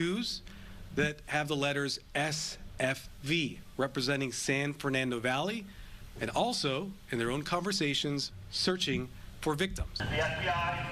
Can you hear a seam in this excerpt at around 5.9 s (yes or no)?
no